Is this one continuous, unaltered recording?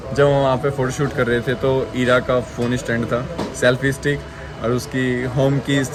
yes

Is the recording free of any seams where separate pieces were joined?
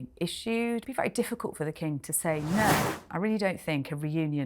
no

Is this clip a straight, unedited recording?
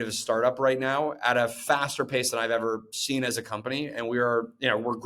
yes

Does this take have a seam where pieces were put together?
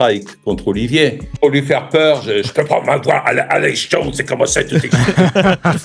yes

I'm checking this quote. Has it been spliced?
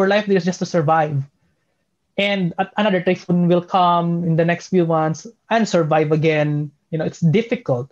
no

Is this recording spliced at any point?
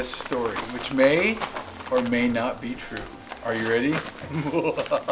no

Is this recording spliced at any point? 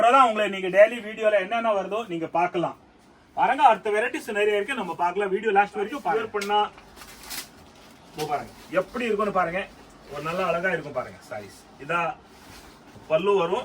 yes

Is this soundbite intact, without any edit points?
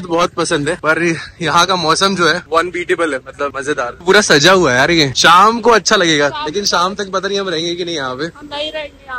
yes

